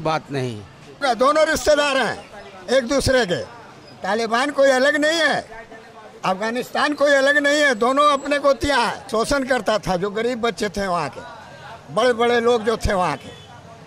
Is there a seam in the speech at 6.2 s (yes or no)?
no